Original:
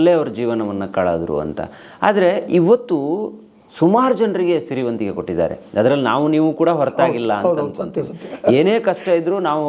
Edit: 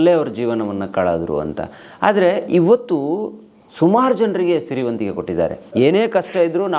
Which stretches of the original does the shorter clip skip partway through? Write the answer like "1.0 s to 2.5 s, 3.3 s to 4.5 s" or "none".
5.8 s to 8.5 s